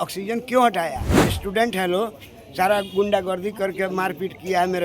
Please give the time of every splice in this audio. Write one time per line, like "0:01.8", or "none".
0:01.3